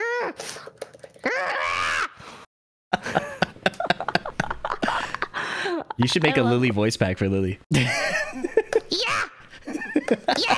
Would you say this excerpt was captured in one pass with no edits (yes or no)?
yes